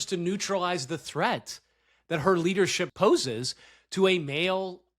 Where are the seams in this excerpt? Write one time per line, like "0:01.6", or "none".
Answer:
0:02.8